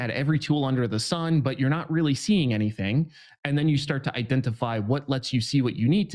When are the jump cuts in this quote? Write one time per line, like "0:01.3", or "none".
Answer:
none